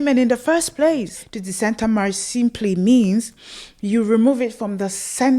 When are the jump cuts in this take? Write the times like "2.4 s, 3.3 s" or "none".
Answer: 1.2 s